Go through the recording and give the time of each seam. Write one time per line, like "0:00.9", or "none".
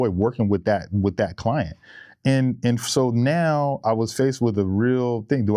none